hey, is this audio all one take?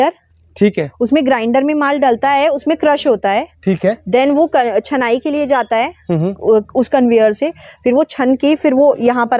yes; 0 cuts

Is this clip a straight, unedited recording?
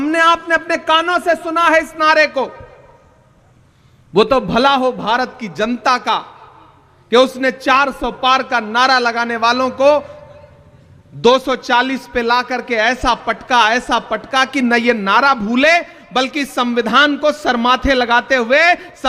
yes; 0 cuts

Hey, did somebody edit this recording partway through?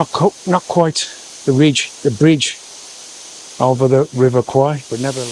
no; 0 cuts

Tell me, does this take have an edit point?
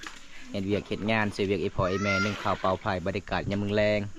no; 0 cuts

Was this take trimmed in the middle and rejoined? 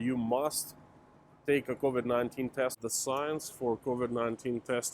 yes; 1 cut; at 2.8 s

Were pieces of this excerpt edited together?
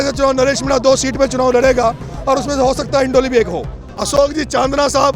yes; 1 cut; at 4.2 s

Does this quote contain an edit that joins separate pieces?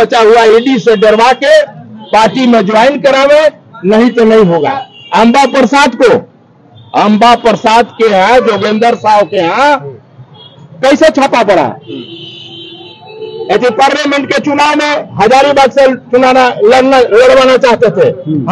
no; 0 cuts

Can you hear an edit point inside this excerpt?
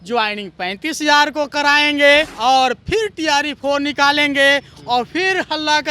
yes; 1 cut; at 2.3 s

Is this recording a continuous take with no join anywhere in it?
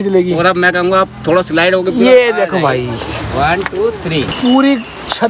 no; 1 cut; at 4.3 s

